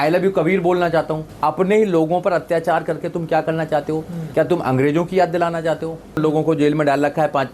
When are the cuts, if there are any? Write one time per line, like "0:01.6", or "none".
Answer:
0:01.2
0:06.2